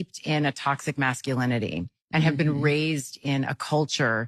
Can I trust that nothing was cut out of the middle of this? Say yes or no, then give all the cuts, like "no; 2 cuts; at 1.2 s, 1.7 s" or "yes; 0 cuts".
no; 1 cut; at 1.4 s